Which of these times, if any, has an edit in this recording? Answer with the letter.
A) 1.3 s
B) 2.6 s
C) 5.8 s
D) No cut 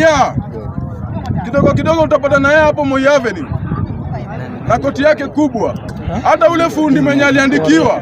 D